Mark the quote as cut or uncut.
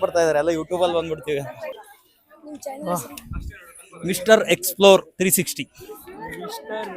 cut